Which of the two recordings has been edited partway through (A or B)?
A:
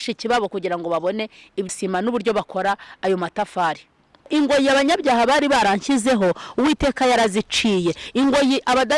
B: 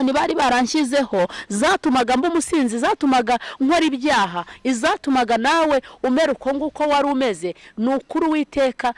A